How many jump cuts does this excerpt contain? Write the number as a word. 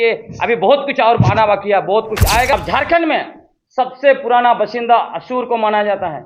one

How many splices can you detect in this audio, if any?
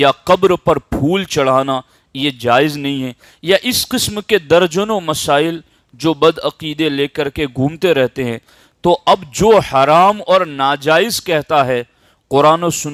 zero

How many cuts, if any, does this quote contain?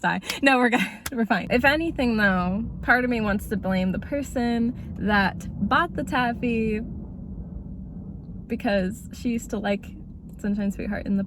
one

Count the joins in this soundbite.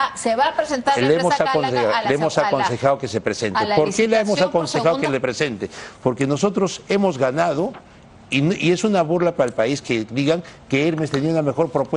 zero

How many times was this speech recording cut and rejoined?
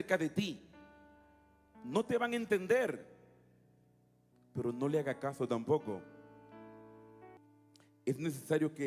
one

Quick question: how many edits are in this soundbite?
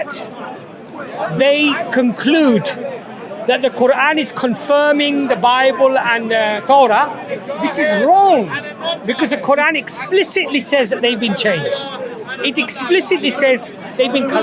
zero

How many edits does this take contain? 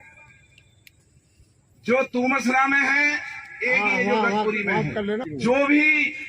one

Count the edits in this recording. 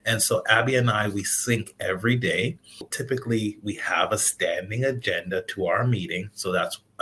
one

